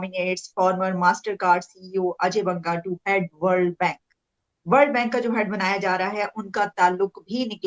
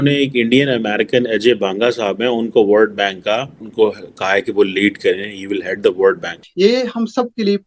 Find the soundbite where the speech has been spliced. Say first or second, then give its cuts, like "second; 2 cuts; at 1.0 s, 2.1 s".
second; 2 cuts; at 3.6 s, 6.4 s